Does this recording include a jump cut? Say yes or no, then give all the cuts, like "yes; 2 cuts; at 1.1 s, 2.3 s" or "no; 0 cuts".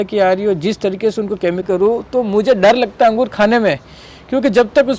yes; 1 cut; at 1.6 s